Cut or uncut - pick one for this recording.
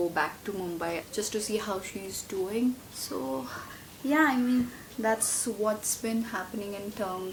uncut